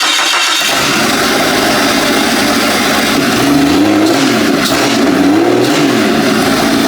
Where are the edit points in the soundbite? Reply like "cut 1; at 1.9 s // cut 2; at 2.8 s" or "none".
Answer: cut 1; at 3.2 s